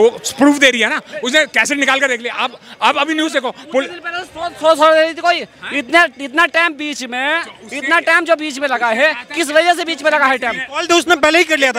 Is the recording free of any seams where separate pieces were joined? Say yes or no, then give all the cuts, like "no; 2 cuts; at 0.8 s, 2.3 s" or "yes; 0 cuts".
yes; 0 cuts